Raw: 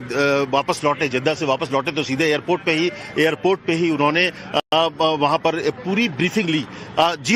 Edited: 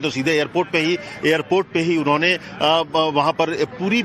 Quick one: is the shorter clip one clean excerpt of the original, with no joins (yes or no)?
no